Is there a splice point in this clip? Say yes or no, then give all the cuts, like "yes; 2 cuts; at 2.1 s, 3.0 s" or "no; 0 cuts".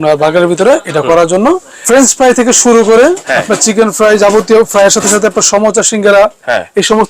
yes; 1 cut; at 1.7 s